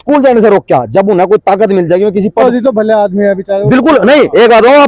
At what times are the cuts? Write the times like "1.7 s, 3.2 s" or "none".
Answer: 2.4 s